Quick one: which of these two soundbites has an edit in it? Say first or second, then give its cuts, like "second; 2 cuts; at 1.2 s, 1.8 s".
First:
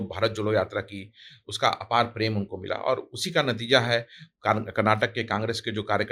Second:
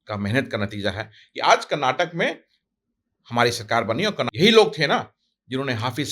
second; 1 cut; at 4.3 s